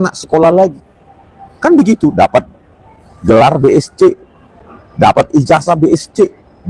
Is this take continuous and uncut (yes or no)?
yes